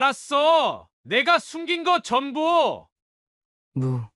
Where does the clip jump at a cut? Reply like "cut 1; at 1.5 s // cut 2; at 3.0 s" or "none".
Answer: cut 1; at 2.9 s

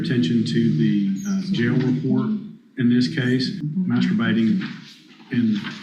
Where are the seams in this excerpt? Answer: cut 1; at 3.6 s

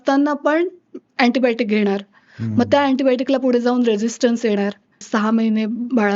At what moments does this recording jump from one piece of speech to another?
cut 1; at 5.0 s

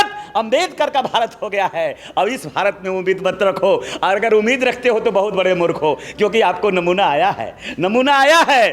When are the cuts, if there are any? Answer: none

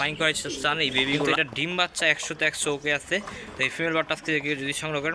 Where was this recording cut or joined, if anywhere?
cut 1; at 1.3 s

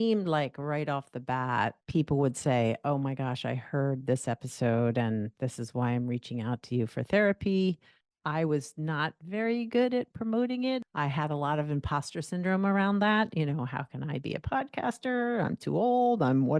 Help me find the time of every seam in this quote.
cut 1; at 1.8 s // cut 2; at 10.8 s

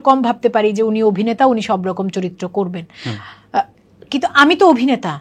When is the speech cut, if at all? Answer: none

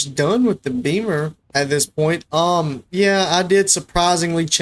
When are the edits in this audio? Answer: none

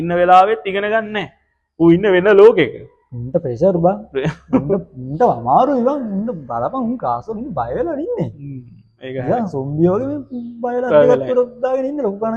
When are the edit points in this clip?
none

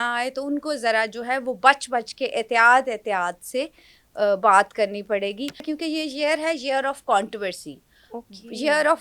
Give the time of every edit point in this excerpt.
cut 1; at 5.6 s

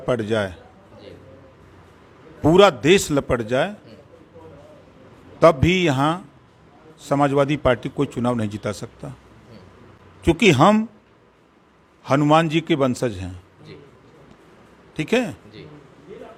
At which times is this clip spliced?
none

